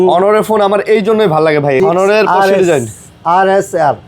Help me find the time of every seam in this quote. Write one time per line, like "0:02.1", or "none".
0:01.8